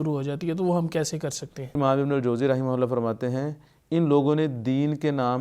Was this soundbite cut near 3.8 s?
no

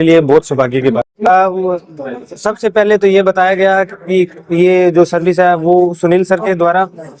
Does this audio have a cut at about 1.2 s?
no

